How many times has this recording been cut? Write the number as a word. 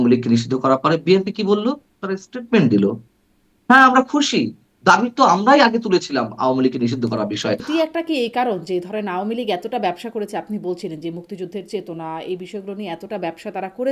one